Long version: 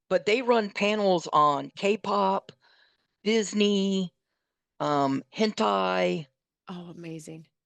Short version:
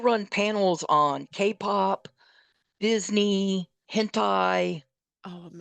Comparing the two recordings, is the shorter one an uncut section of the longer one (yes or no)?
no